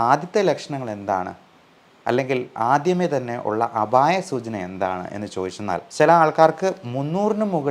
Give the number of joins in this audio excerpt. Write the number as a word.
one